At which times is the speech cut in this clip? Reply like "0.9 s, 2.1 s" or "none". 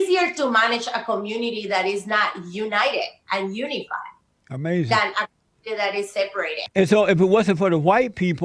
6.6 s